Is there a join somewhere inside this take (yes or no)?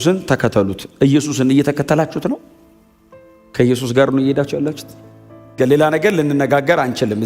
yes